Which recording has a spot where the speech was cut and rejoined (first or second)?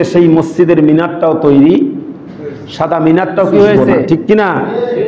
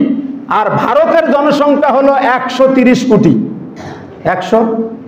first